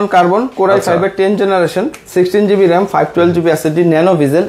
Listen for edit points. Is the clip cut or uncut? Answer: uncut